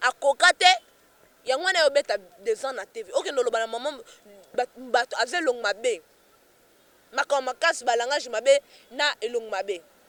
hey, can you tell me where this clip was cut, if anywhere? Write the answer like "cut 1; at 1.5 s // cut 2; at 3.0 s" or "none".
none